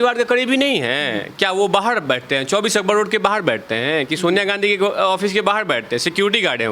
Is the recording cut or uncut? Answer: uncut